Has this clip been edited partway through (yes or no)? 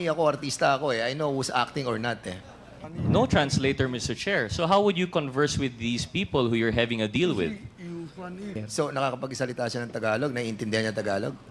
yes